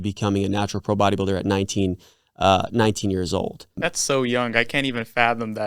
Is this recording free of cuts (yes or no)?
no